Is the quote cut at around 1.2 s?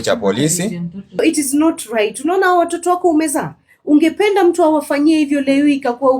yes; 1 cut; at 1.2 s

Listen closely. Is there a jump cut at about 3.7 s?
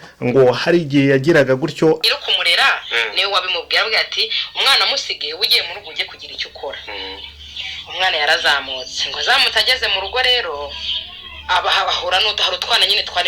no; 1 cut; at 2.0 s

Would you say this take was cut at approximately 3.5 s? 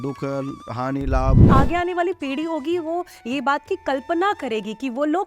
no; 1 cut; at 1.4 s

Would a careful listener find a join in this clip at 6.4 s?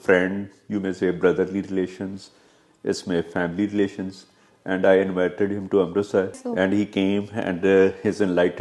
yes; 1 cut; at 6.4 s

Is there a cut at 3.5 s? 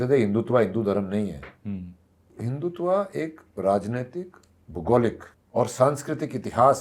no; 2 cuts; at 2.3 s, 5.3 s

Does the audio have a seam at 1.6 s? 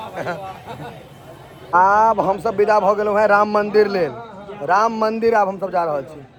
no; 0 cuts

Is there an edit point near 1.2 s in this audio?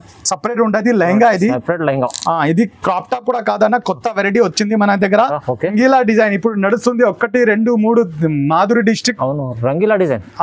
no; 1 cut; at 5.7 s

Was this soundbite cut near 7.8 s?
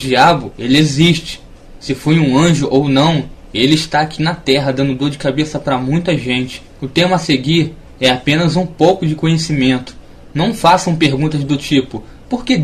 yes; 1 cut; at 7.8 s

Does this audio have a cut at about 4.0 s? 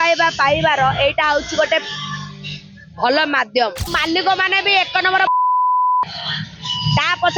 yes; 1 cut; at 4.0 s

